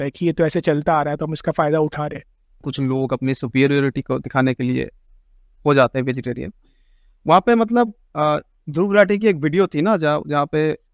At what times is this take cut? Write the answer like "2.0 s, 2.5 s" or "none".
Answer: 2.6 s